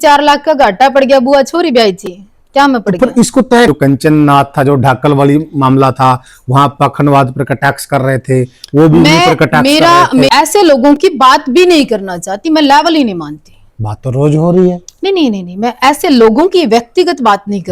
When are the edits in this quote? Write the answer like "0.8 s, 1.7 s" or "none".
3.7 s, 10.3 s

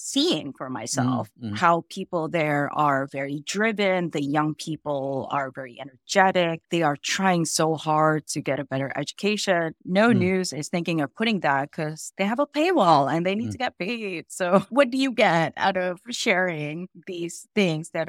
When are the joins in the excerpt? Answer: 9.8 s

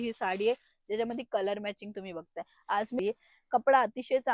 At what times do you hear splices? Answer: 3.0 s

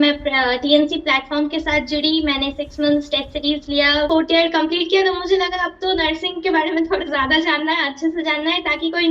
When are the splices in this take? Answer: 4.1 s

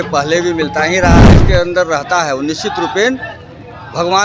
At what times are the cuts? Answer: 1.3 s

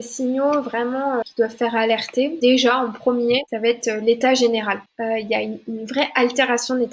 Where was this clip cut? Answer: 1.2 s, 2.3 s, 3.5 s, 4.9 s

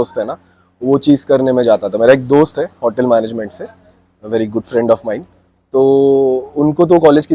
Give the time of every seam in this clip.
none

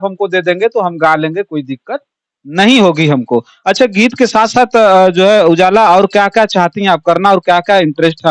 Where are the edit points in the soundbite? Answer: none

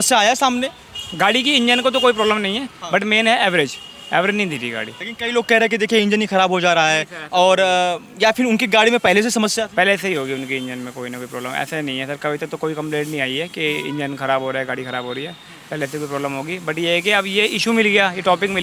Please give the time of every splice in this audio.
none

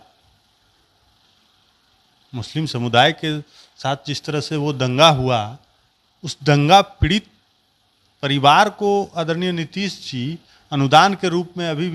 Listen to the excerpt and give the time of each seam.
none

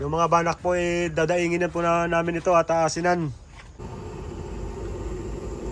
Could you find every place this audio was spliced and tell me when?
3.8 s

